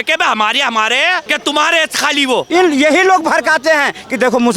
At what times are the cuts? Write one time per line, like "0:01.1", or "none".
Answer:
0:01.3
0:02.5